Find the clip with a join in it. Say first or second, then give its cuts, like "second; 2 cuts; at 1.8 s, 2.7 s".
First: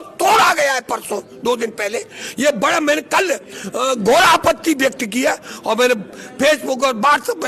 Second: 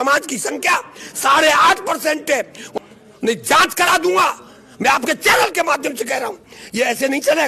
second; 1 cut; at 2.8 s